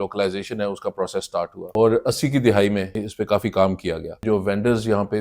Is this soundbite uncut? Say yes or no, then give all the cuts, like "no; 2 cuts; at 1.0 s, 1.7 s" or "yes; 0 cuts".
no; 3 cuts; at 1.6 s, 3.0 s, 4.2 s